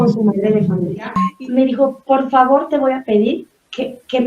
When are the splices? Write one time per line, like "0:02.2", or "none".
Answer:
0:01.2